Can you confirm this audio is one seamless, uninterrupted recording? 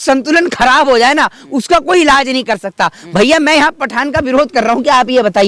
yes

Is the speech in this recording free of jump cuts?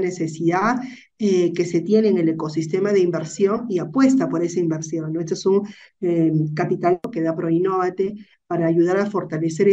no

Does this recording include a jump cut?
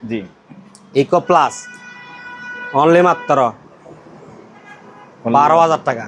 no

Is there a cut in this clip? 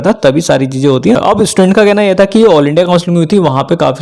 yes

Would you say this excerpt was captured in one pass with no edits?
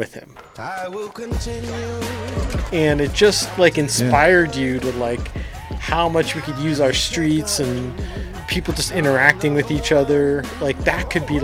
no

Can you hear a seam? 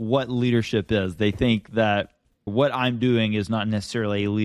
no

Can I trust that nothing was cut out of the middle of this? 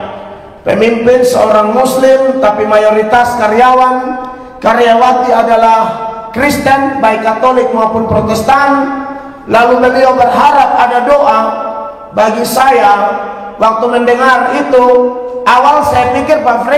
yes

